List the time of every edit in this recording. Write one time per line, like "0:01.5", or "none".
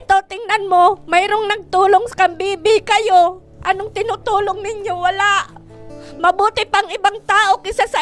none